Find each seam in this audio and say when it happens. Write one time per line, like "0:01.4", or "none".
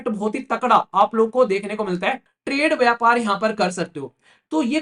0:02.3